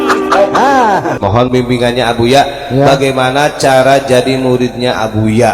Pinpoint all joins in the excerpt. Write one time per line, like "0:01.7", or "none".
0:01.1